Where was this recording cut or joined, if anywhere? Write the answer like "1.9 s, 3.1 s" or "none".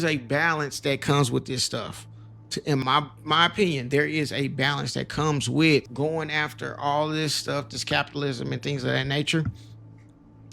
2.8 s, 5.9 s